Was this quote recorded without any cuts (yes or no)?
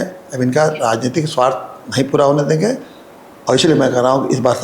yes